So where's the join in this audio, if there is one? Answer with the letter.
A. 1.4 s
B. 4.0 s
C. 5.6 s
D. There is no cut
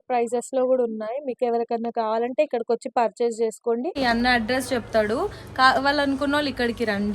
B